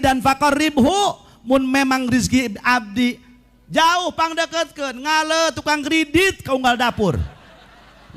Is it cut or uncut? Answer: uncut